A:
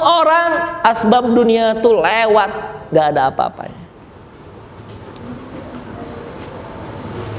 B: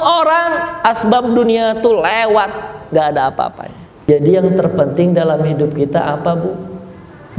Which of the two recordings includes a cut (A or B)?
B